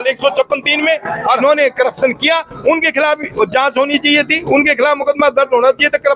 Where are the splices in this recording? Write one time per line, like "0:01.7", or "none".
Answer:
0:01.4